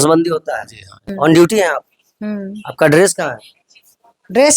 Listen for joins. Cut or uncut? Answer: cut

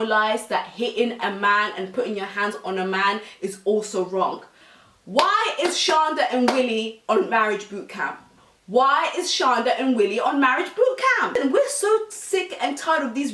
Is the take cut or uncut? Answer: cut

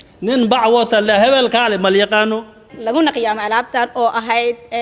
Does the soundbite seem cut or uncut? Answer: cut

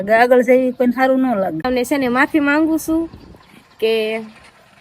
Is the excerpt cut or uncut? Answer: cut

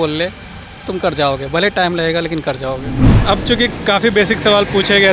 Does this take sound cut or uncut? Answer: cut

